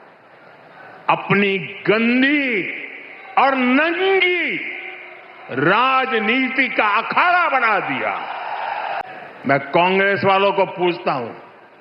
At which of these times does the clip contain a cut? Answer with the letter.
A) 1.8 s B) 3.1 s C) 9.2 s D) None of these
C